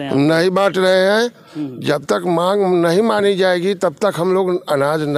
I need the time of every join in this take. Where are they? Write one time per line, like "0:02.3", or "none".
none